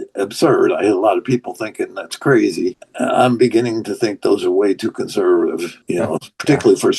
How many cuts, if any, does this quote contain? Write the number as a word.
two